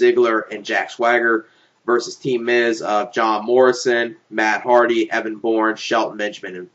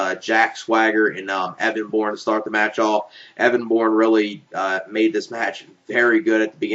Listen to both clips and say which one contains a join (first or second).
first